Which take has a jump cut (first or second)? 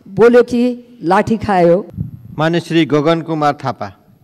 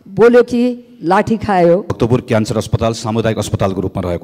second